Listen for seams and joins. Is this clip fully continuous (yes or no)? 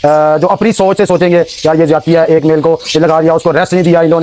yes